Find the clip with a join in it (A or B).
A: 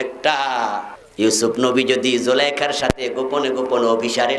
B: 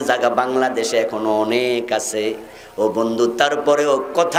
A